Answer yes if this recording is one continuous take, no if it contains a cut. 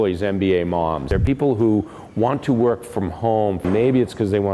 no